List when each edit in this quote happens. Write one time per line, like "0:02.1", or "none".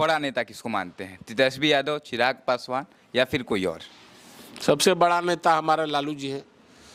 none